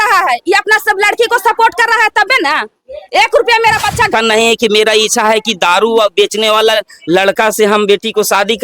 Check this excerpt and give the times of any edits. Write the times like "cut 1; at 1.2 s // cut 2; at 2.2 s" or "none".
cut 1; at 4.1 s